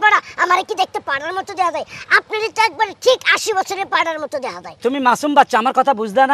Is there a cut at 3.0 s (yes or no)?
no